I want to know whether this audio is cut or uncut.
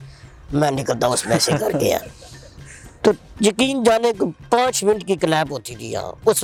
uncut